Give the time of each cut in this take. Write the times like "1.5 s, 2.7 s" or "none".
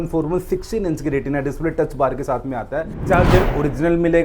2.9 s